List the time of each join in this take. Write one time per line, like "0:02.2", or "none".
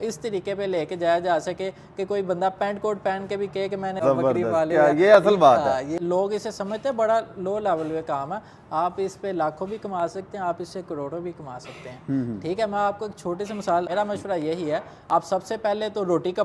0:03.9
0:05.8
0:13.9